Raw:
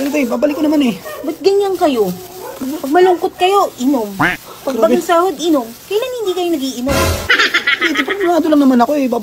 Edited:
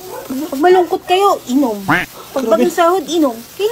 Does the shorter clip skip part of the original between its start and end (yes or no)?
no